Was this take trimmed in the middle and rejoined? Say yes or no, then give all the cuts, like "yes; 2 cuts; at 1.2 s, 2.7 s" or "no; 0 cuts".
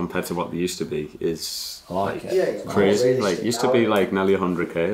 no; 0 cuts